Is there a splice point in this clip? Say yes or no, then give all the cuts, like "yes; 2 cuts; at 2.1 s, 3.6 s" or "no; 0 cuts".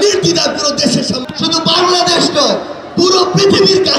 yes; 1 cut; at 1.2 s